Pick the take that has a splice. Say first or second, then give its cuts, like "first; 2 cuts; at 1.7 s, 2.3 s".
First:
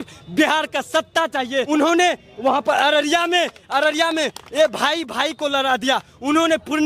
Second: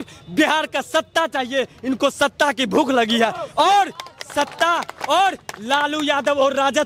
first; 1 cut; at 1.7 s